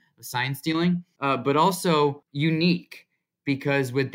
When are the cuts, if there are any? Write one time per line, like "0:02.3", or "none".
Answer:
0:01.1
0:02.3